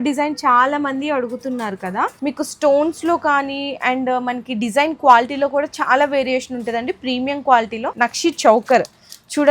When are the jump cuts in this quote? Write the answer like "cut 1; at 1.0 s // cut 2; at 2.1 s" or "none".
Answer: cut 1; at 2.2 s // cut 2; at 7.8 s